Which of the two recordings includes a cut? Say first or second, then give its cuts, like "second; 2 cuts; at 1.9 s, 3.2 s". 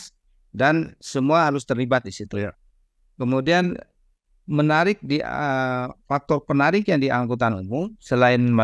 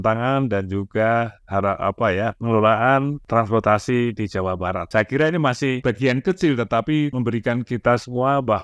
second; 4 cuts; at 3.2 s, 4.8 s, 5.8 s, 7.1 s